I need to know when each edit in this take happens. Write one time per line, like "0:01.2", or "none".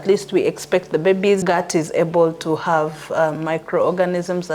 0:01.4